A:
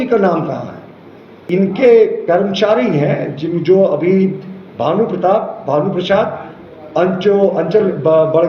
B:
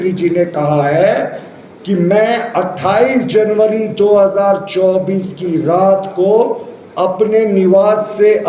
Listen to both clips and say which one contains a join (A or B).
A